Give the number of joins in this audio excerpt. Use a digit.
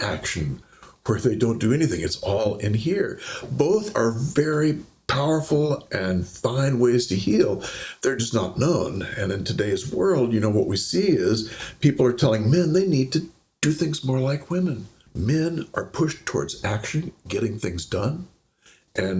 1